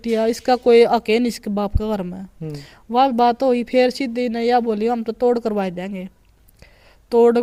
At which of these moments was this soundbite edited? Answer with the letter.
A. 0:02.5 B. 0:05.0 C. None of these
C